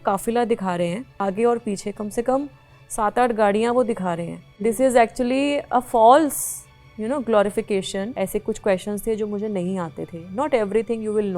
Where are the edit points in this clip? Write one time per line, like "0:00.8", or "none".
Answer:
0:01.2
0:04.4
0:08.1